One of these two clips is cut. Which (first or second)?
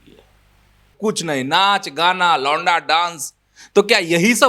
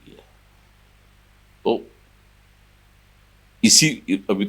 first